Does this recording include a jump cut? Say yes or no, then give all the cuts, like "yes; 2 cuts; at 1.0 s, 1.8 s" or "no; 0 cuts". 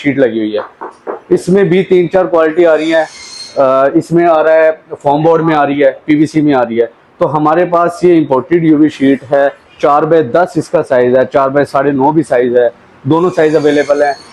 no; 0 cuts